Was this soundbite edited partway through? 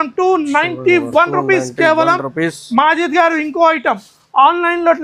no; 0 cuts

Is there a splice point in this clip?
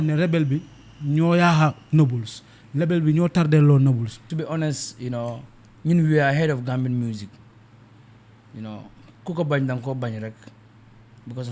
yes; 1 cut; at 4.3 s

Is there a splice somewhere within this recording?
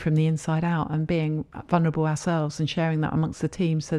no; 0 cuts

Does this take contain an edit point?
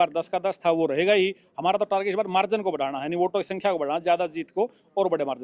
no; 0 cuts

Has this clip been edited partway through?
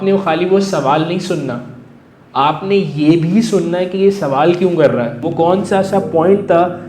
yes; 1 cut; at 5.2 s

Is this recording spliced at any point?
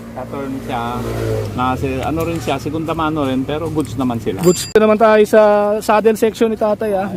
yes; 1 cut; at 4.7 s

